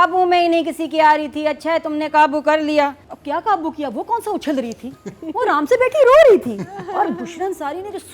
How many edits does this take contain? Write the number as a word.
one